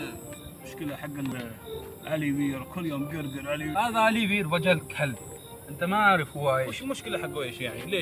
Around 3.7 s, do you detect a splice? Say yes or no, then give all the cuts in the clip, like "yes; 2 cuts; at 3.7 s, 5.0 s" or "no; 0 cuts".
yes; 2 cuts; at 1.3 s, 3.7 s